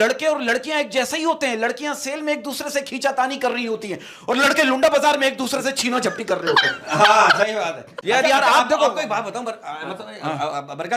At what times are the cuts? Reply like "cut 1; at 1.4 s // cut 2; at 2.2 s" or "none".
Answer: cut 1; at 8.0 s